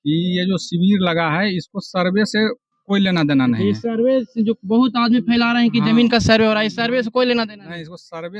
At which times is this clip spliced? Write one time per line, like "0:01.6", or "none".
none